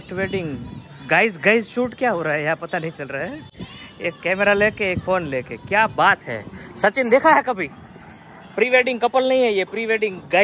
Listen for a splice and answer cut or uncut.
uncut